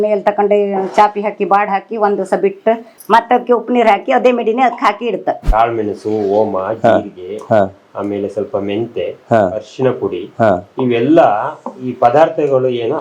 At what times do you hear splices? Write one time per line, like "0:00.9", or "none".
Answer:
0:03.1
0:05.4